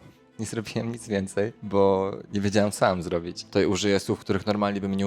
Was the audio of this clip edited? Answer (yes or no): yes